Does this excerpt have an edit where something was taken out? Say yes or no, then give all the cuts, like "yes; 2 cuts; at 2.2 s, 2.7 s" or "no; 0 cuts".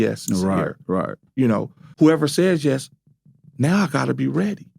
yes; 1 cut; at 1.8 s